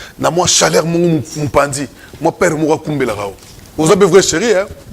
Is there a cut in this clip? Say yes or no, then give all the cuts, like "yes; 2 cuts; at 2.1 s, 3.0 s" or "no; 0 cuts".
no; 0 cuts